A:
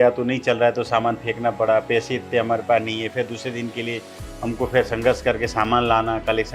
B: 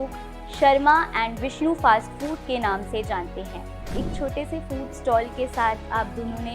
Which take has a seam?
B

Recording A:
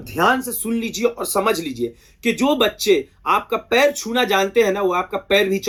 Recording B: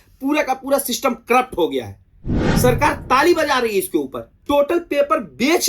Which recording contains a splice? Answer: B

